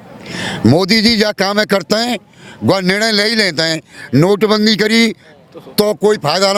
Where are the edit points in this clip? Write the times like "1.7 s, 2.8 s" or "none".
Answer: none

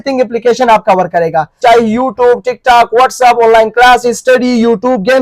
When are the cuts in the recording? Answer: 1.6 s

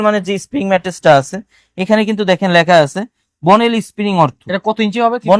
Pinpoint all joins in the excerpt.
none

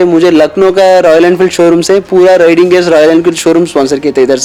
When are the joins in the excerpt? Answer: none

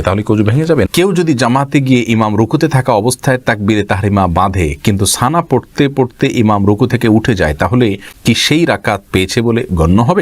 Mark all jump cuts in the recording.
0.9 s, 8.1 s

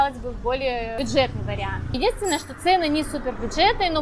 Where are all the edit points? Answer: 1.0 s, 2.0 s

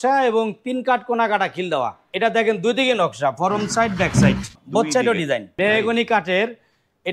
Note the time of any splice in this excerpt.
2.0 s, 4.5 s, 5.5 s

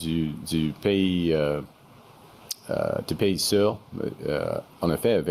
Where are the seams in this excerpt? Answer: none

